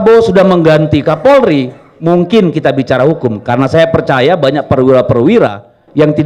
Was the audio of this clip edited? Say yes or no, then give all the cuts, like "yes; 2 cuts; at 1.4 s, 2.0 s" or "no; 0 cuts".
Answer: no; 0 cuts